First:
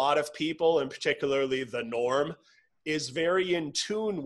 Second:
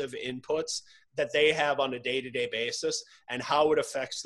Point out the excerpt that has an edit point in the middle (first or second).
second